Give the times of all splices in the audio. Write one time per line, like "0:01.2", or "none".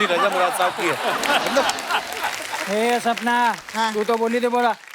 0:02.5